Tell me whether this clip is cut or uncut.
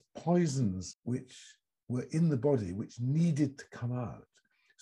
cut